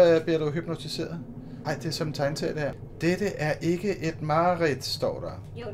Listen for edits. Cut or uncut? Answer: uncut